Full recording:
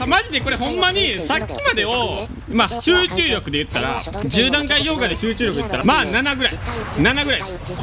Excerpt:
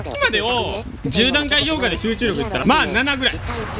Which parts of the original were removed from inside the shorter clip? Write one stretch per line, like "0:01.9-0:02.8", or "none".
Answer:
0:02.4-0:04.1